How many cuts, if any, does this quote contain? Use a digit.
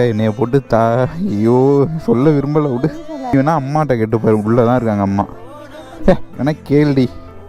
1